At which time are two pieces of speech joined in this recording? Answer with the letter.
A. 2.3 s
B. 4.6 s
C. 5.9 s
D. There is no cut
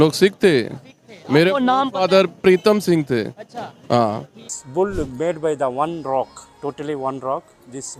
B